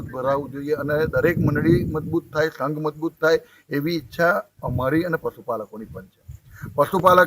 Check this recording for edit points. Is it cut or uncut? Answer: uncut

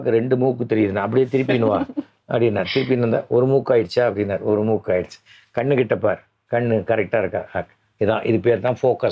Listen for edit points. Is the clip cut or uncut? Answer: uncut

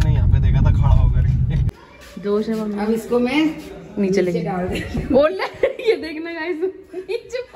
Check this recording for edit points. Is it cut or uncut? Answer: cut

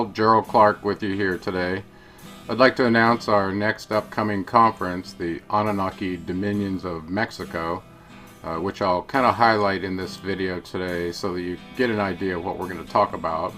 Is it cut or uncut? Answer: uncut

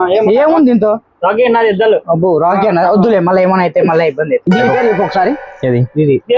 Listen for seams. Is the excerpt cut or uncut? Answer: cut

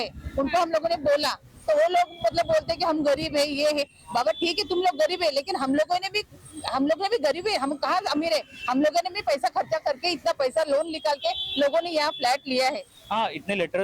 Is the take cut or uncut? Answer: cut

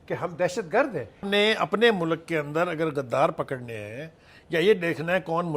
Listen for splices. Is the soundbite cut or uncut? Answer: cut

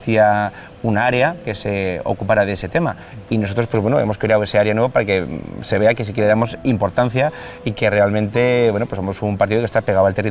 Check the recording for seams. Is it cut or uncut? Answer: uncut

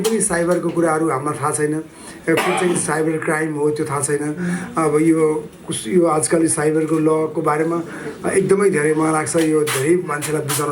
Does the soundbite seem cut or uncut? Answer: uncut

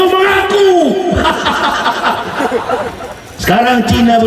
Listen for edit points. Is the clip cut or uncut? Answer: cut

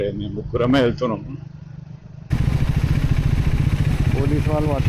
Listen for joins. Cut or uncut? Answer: cut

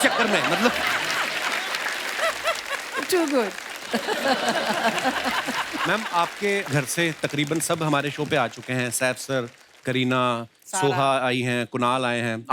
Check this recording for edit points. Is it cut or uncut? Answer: uncut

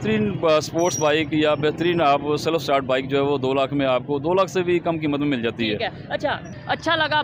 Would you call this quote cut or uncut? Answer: uncut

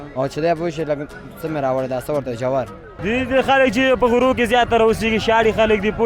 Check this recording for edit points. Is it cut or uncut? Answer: cut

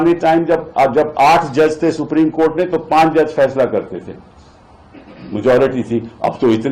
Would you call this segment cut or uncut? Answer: uncut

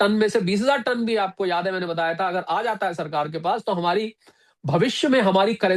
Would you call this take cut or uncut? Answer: uncut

